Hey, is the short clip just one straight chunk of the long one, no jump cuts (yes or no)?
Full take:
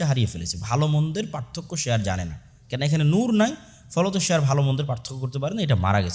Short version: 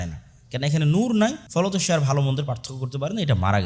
no